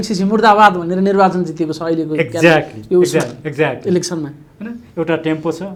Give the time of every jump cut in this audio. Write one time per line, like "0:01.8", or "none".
none